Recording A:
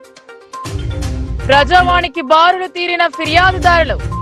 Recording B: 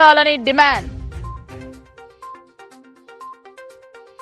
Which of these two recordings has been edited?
B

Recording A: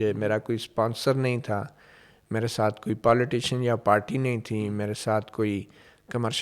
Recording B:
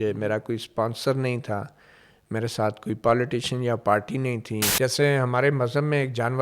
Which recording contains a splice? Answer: B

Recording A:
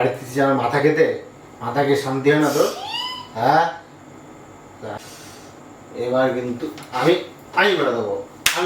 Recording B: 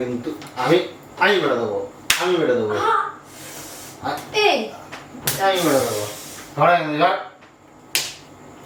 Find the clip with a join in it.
A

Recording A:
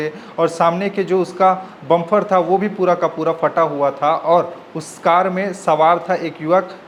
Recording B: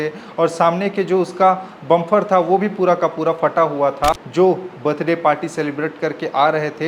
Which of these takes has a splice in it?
B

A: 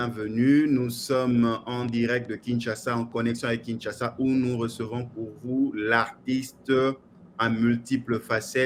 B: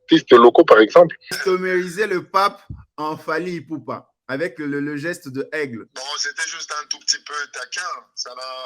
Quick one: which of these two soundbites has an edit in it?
B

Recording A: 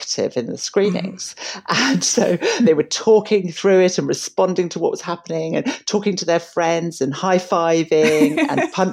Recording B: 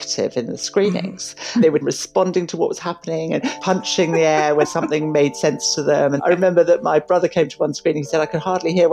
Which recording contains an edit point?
B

